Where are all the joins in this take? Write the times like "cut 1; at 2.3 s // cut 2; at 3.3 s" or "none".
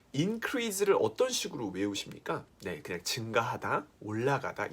cut 1; at 2.5 s